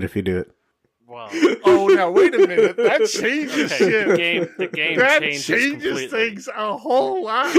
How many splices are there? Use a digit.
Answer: 0